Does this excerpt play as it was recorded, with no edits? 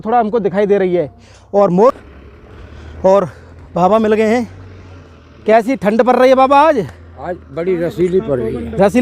no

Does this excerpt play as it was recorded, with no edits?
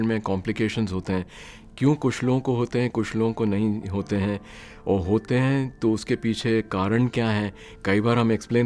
yes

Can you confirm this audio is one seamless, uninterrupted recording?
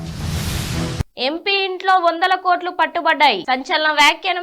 no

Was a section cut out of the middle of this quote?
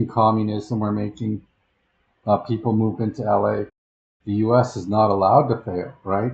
yes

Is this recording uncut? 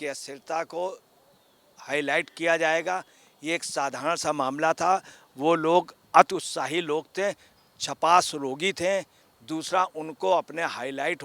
yes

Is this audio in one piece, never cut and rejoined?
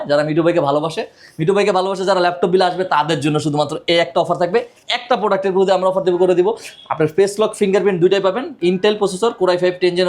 no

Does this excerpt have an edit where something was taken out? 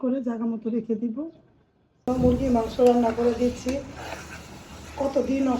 yes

